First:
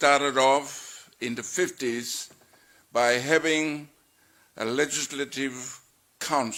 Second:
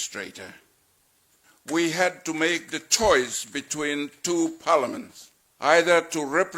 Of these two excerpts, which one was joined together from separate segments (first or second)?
second